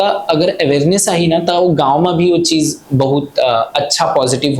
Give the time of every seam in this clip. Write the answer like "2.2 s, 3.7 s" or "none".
none